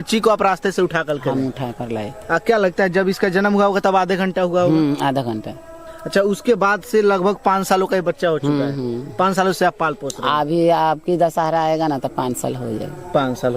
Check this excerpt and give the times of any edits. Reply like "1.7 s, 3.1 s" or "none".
none